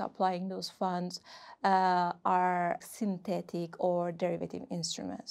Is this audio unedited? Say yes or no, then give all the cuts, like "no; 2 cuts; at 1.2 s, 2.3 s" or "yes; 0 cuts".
no; 1 cut; at 2.8 s